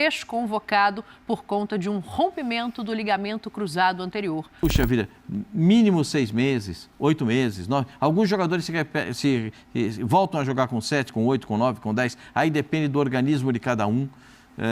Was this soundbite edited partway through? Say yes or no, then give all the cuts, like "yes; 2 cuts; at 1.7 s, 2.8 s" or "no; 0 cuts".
yes; 1 cut; at 4.5 s